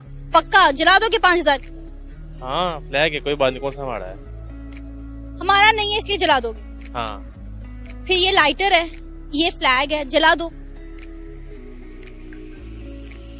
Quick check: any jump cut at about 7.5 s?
yes; 1 cut; at 7.5 s

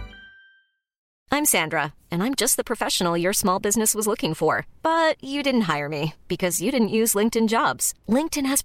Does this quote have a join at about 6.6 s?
no; 1 cut; at 1.1 s

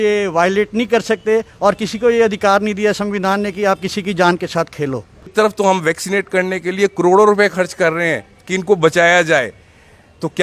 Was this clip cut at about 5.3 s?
yes; 1 cut; at 5.3 s

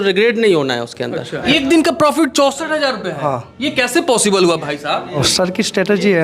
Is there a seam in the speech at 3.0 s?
no; 2 cuts; at 1.4 s, 5.2 s

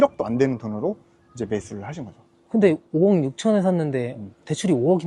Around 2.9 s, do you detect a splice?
no; 0 cuts

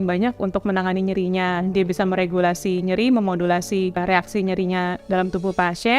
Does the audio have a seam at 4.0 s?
yes; 1 cut; at 4.0 s

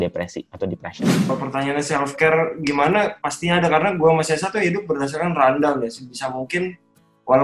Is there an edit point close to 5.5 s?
no; 1 cut; at 1.3 s

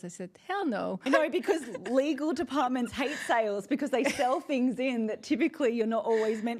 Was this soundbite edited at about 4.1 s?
no; 1 cut; at 1.1 s

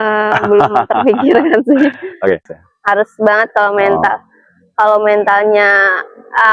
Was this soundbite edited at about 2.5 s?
yes; 1 cut; at 2.5 s

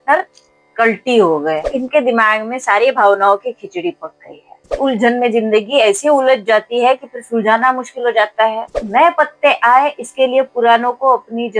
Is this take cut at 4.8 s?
yes; 3 cuts; at 1.7 s, 4.8 s, 8.8 s

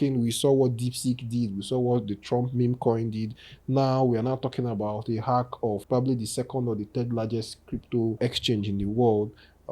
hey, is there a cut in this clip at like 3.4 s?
no; 2 cuts; at 5.8 s, 8.2 s

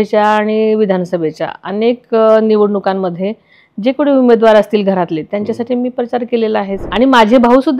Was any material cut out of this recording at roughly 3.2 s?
no; 1 cut; at 6.9 s

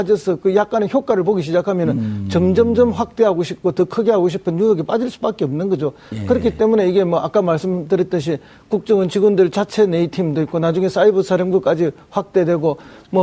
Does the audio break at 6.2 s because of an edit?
yes; 1 cut; at 6.2 s

